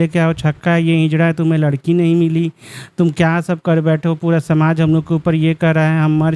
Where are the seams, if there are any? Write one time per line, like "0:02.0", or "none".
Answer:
none